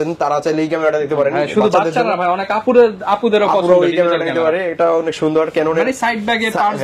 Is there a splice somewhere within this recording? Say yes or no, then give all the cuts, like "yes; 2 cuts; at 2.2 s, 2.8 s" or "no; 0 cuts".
no; 0 cuts